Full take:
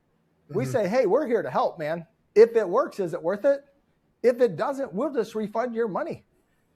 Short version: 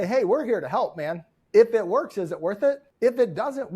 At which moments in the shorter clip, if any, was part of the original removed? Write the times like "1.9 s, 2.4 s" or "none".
2.9 s

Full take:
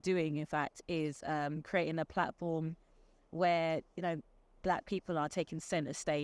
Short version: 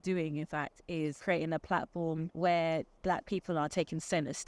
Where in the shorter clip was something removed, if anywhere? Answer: 1.2 s, 2.3 s, 2.9 s

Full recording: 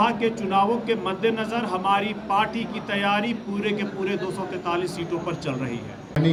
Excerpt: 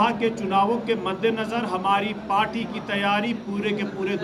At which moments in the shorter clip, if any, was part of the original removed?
none

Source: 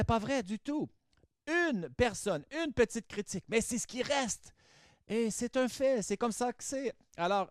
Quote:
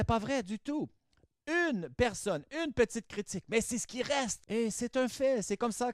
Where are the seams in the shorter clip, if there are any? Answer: 4.4 s

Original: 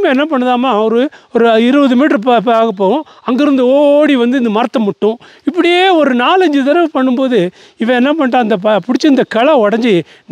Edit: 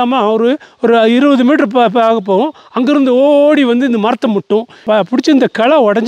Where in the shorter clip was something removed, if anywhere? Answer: 4.8 s

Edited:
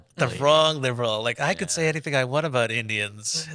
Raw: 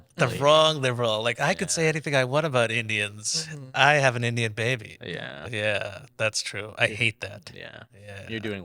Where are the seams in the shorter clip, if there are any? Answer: none

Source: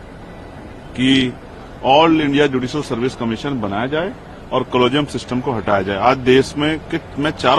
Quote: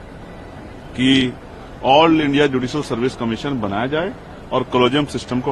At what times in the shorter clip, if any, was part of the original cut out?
none

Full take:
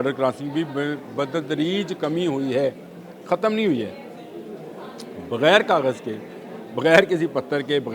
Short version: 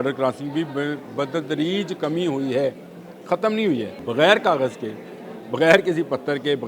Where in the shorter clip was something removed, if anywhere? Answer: 4.0 s

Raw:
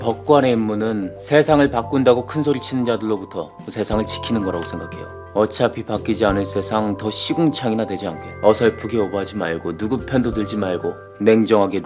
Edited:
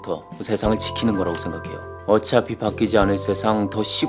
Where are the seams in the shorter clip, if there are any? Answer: none

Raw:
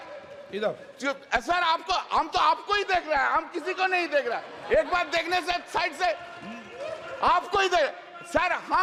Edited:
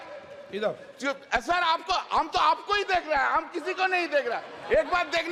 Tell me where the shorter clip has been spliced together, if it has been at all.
none

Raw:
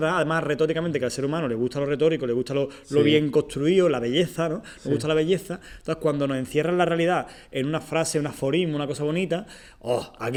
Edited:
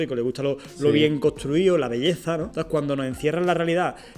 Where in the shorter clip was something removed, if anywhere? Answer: 2.5 s

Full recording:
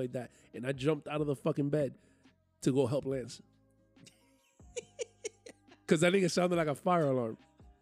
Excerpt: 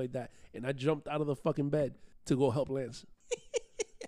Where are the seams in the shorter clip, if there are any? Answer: 2.1 s, 3.1 s

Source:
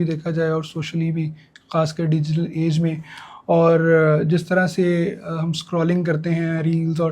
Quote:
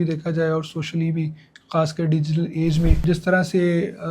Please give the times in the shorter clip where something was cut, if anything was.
3.0 s

